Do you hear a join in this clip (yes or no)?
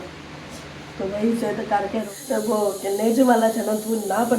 yes